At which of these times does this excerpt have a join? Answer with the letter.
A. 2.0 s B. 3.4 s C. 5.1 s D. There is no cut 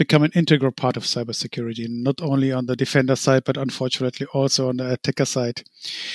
D